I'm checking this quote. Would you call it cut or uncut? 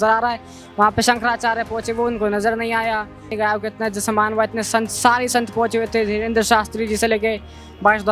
cut